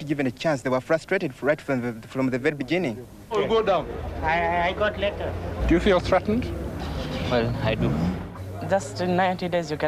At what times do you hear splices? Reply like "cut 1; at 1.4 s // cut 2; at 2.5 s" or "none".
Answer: none